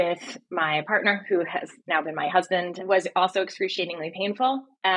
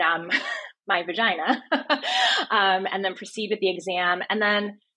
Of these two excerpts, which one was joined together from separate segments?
first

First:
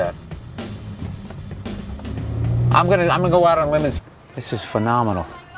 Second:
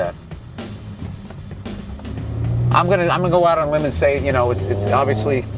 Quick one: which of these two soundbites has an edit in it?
second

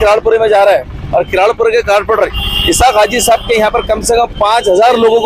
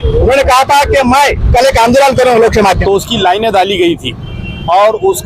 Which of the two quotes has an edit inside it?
second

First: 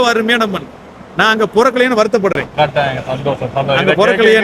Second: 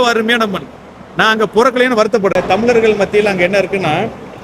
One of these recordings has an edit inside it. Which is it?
second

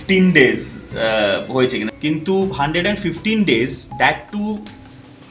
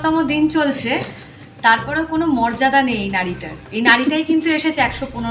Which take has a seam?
first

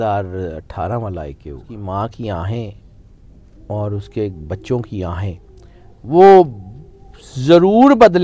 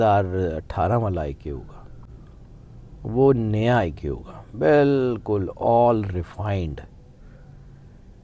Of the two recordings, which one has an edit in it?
first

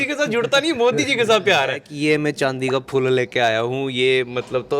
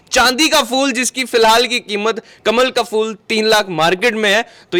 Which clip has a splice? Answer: first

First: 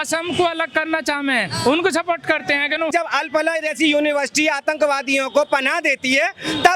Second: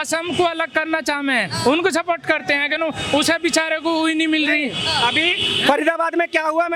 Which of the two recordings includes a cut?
first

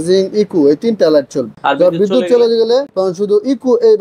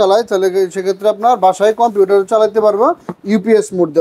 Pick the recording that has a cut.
first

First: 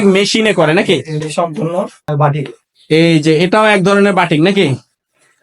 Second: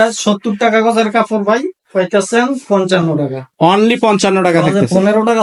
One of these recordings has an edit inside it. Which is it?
first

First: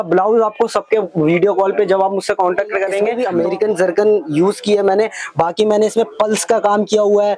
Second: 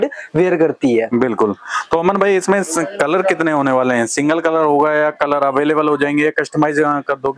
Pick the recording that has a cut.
first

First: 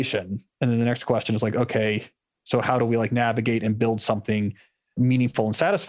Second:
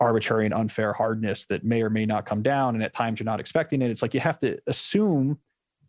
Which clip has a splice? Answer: first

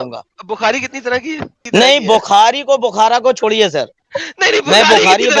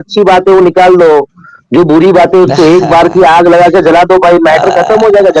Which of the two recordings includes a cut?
first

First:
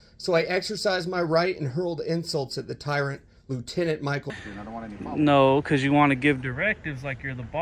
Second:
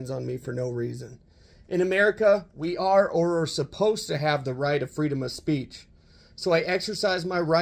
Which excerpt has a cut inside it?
first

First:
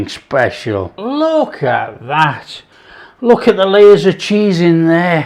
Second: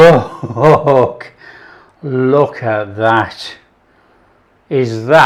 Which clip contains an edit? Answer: first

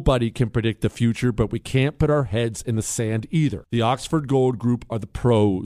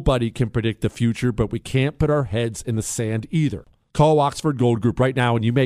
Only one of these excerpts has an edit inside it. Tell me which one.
second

